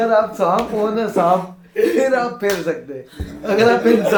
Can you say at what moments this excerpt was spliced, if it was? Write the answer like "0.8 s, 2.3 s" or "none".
none